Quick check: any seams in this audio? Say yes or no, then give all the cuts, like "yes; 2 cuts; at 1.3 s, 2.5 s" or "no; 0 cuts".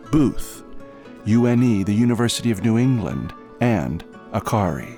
no; 0 cuts